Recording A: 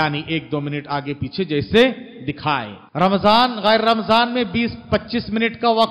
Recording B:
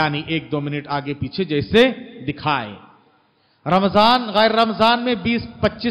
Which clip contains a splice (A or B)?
A